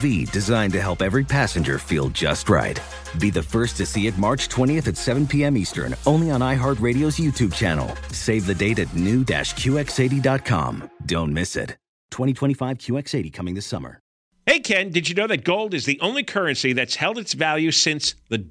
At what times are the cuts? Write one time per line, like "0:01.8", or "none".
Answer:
0:14.2